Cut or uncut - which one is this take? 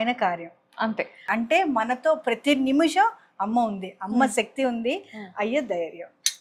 cut